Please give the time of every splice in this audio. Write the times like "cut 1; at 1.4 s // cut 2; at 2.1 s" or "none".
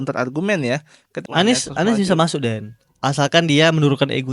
cut 1; at 1.2 s